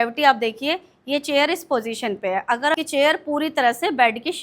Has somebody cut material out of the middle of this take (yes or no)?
yes